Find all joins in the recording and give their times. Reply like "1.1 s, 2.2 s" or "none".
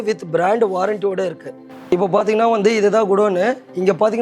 1.8 s